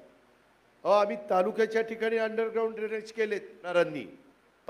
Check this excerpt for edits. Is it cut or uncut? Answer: cut